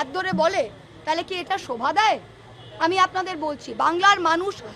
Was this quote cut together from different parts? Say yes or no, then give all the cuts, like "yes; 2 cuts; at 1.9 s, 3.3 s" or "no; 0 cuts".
no; 0 cuts